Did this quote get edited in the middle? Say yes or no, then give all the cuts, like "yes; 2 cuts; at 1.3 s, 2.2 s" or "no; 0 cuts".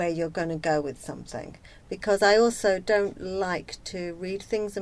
no; 0 cuts